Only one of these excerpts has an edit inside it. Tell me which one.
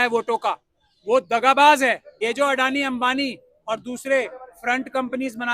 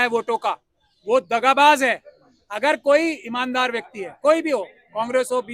first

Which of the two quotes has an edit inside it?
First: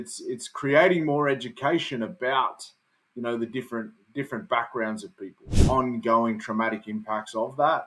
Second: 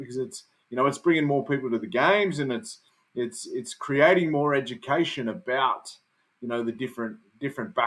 first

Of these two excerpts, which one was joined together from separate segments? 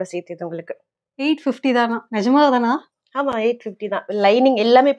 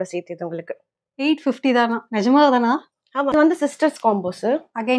second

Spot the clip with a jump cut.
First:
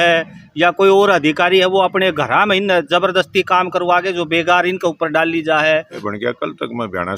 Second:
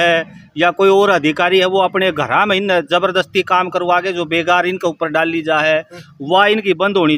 first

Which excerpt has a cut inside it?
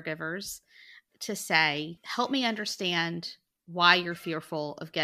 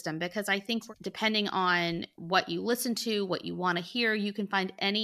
second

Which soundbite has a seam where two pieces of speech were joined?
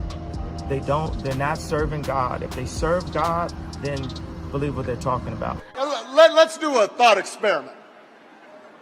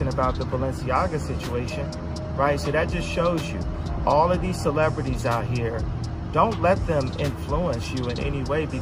first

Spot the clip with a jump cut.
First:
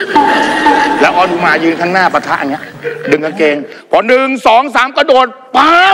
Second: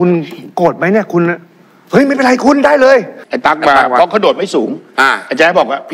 second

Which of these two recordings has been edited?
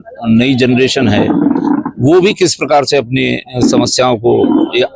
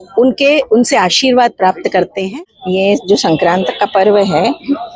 second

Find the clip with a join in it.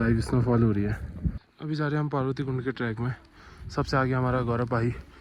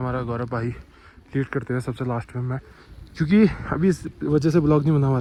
first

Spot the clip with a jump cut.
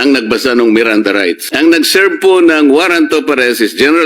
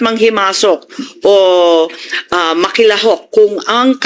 first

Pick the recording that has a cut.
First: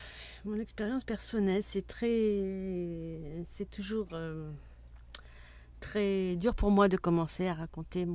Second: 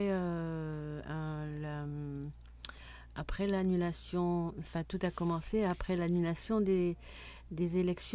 second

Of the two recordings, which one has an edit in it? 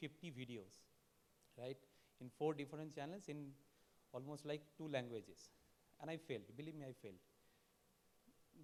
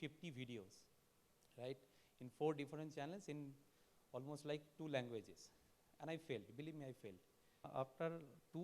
second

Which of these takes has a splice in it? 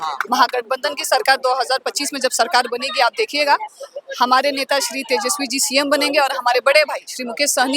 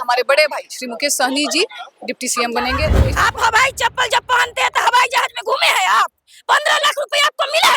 second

